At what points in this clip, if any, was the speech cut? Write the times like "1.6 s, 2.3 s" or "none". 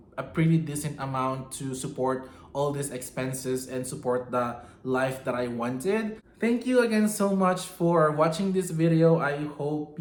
none